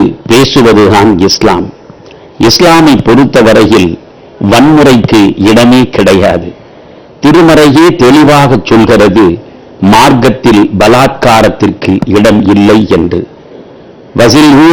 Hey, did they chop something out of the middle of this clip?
no; 0 cuts

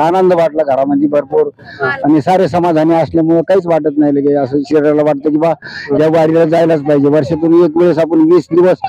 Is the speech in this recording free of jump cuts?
yes; 0 cuts

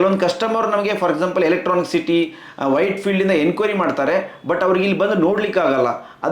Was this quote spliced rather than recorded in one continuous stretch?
no; 0 cuts

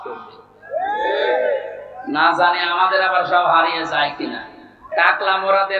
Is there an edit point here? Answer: yes; 1 cut; at 4.9 s

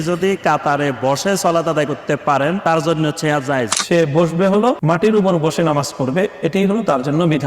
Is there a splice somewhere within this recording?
yes; 3 cuts; at 2.6 s, 3.8 s, 4.8 s

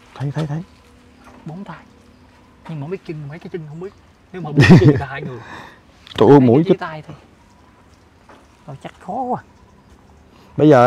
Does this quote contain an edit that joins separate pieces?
no; 0 cuts

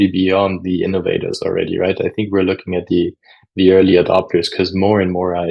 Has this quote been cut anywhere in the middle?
no; 0 cuts

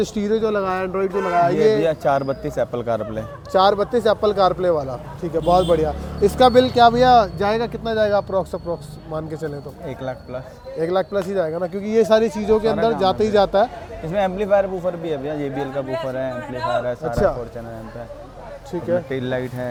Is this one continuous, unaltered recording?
yes; 0 cuts

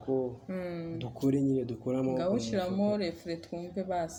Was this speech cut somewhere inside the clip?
no; 0 cuts

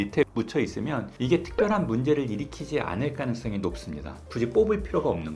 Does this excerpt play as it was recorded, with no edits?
no; 1 cut; at 4.3 s

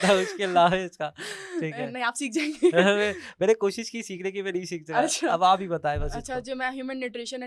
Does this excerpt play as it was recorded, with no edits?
yes; 0 cuts

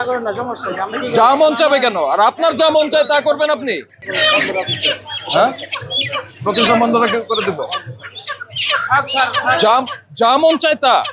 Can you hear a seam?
no; 0 cuts

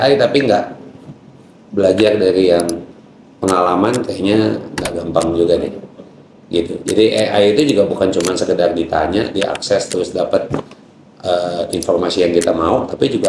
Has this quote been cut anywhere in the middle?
no; 0 cuts

